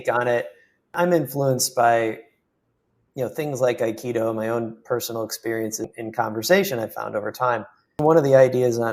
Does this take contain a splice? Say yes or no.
yes